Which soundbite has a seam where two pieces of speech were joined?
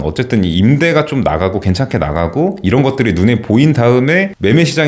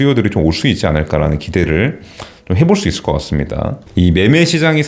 second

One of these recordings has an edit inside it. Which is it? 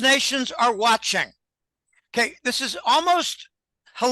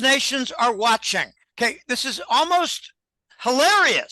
second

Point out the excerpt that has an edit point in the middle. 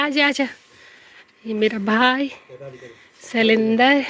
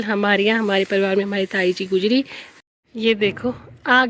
second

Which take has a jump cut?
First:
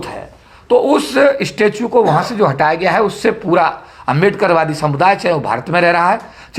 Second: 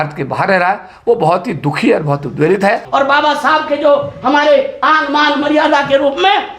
second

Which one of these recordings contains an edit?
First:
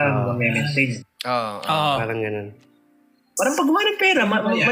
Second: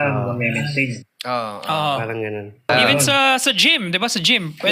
second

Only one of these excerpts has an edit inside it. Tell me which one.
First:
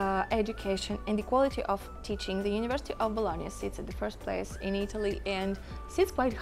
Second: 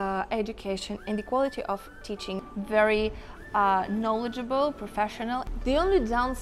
second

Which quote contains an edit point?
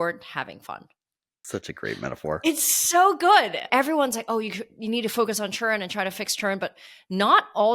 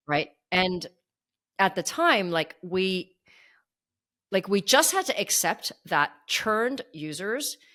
first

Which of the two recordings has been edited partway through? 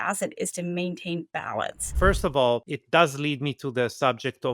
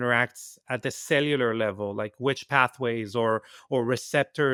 first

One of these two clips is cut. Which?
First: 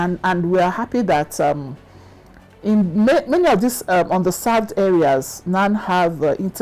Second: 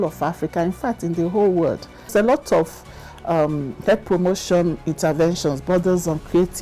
second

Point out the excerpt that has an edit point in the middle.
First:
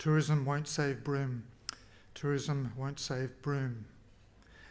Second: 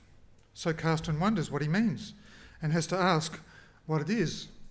second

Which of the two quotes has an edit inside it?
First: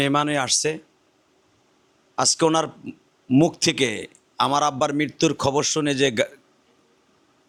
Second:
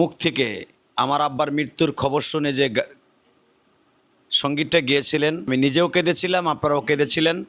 second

